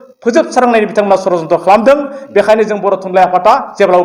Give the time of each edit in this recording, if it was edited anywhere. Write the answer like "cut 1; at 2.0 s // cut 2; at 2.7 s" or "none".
none